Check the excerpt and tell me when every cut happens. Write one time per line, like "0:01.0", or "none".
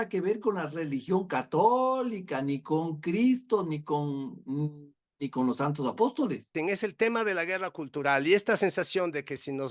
0:06.5